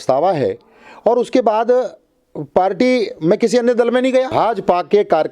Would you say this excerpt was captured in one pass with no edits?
no; 1 cut; at 4.3 s

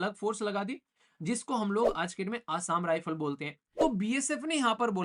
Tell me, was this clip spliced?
yes; 1 cut; at 3.6 s

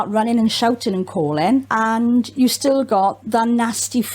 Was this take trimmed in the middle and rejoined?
yes; 2 cuts; at 1.7 s, 3.2 s

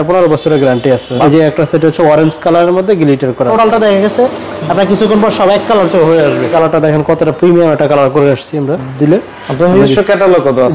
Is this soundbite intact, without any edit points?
no; 4 cuts; at 1.2 s, 3.5 s, 6.5 s, 8.9 s

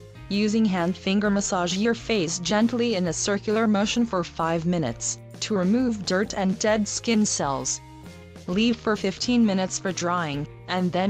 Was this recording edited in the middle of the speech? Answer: no; 0 cuts

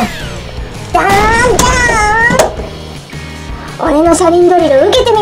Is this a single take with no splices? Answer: yes; 0 cuts

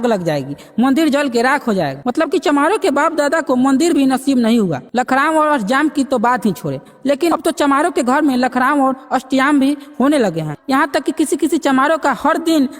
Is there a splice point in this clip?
yes; 2 cuts; at 2.0 s, 4.8 s

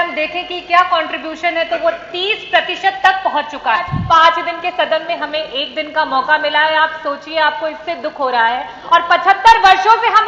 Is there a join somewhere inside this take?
yes; 1 cut; at 4.0 s

